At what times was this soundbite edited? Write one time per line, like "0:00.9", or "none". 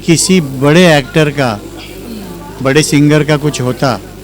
none